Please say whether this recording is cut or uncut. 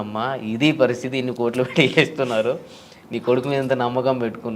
uncut